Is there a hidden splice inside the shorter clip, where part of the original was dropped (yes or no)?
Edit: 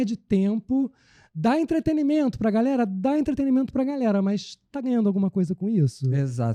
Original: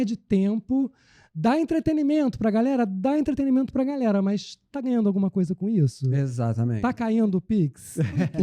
no